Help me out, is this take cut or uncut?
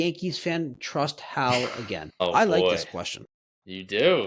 cut